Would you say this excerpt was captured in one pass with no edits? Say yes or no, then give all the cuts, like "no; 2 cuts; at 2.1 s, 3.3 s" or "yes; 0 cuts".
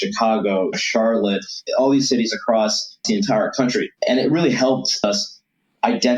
no; 4 cuts; at 1.5 s, 3.0 s, 4.0 s, 5.0 s